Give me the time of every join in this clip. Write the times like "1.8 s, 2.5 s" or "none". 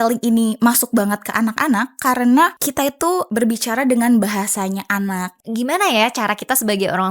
3.1 s, 5.3 s

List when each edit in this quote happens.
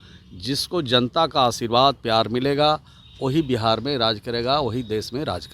none

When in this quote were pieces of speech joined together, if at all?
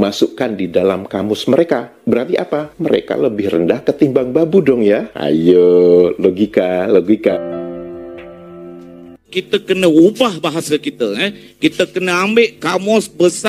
7.3 s, 9.4 s

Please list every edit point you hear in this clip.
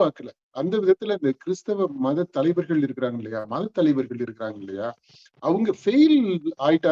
none

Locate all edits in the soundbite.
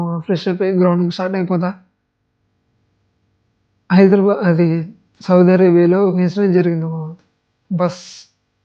none

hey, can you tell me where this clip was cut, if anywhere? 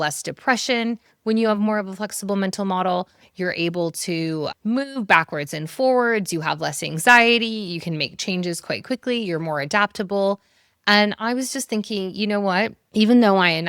none

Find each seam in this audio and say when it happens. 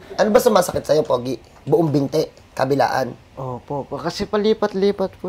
none

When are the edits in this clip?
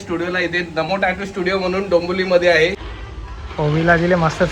2.8 s

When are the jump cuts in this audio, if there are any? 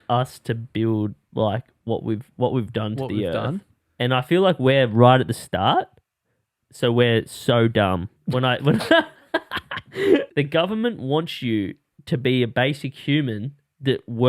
3.7 s, 8.1 s, 10.3 s

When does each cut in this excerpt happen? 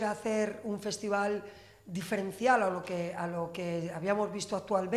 none

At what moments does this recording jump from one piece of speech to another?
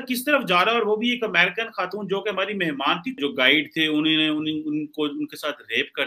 3.2 s

